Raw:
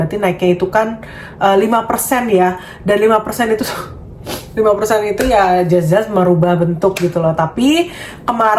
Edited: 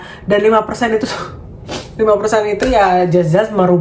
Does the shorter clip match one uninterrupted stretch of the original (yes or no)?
yes